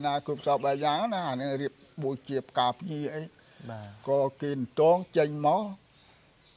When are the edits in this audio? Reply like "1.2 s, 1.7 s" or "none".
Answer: none

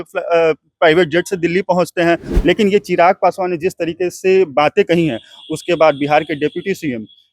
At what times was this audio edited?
2.3 s

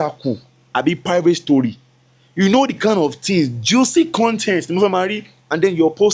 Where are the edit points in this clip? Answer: none

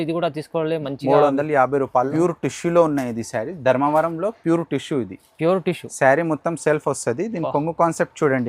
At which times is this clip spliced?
2.1 s

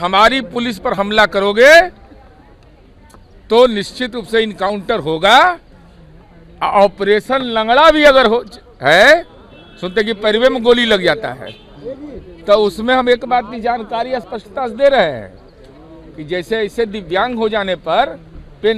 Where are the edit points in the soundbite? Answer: none

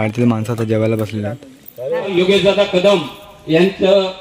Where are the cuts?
2.2 s

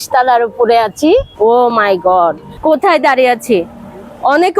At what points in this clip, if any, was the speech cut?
1.3 s, 2.5 s

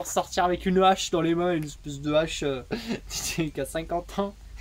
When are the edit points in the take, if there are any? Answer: none

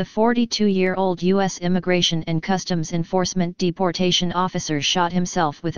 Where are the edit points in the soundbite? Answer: 0.9 s

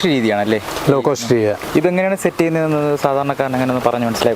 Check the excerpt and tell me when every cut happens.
1.6 s

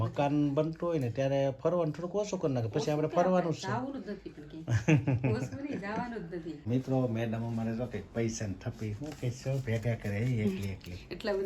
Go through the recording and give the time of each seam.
6.6 s

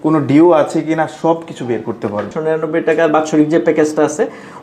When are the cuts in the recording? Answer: 2.3 s

